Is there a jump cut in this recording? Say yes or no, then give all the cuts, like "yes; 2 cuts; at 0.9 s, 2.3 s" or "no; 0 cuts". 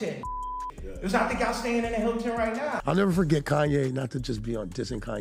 yes; 1 cut; at 2.8 s